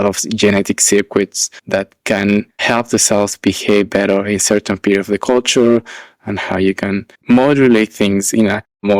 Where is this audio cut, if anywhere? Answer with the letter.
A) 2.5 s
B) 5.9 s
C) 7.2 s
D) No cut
A